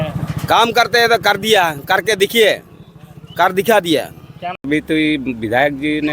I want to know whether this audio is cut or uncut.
cut